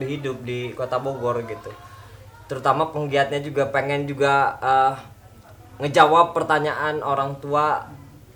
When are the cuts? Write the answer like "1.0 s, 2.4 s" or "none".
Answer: none